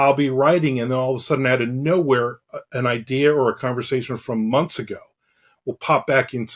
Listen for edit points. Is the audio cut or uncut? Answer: uncut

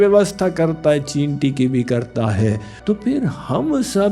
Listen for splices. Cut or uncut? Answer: cut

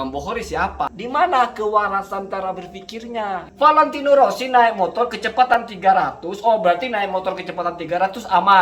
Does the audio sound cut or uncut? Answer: cut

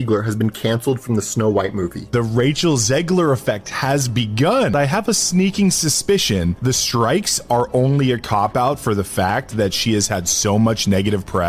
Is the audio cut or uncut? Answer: cut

